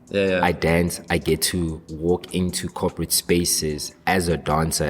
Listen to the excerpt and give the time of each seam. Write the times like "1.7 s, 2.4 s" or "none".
1.8 s